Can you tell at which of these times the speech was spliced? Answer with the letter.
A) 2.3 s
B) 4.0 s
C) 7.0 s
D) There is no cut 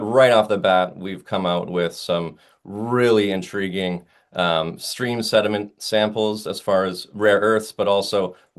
C